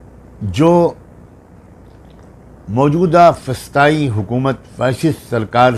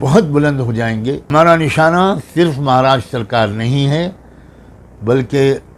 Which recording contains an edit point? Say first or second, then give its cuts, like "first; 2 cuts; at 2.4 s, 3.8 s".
second; 1 cut; at 1.3 s